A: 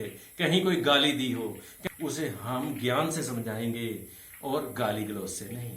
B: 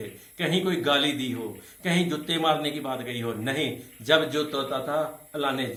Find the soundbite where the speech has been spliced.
A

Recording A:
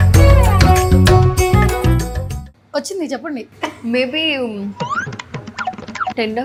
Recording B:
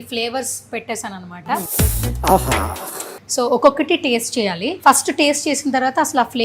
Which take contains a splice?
B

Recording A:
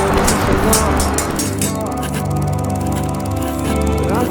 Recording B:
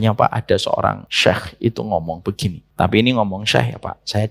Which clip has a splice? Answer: B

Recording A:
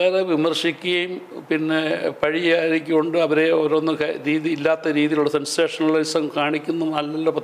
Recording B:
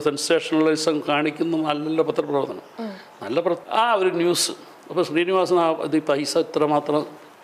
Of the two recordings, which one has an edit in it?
B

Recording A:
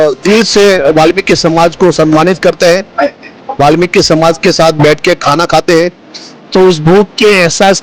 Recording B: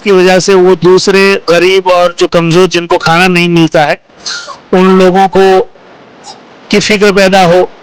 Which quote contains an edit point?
A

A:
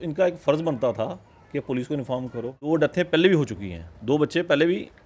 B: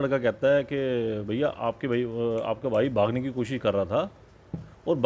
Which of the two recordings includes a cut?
A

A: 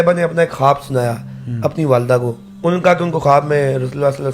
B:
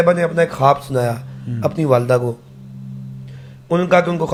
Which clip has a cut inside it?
A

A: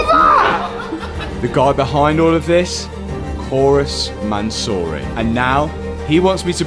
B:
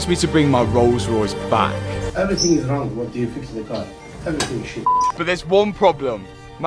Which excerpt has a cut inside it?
B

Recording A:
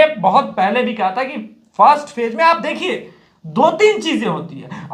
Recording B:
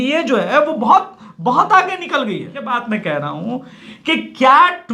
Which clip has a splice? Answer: B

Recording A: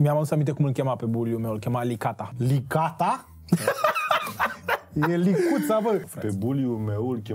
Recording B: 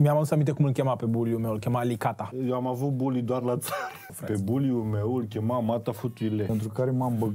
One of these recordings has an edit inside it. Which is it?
B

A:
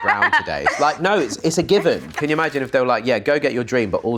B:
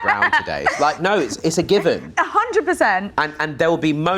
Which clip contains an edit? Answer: A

